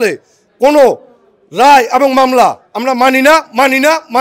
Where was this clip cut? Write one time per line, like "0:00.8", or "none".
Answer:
none